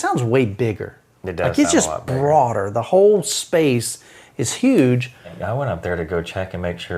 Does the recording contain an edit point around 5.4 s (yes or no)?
yes